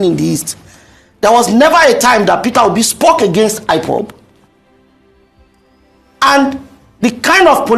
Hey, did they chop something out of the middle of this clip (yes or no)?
no